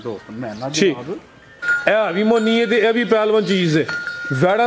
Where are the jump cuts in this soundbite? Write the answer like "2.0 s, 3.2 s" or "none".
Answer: 1.6 s